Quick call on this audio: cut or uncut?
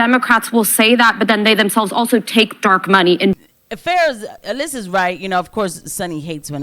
cut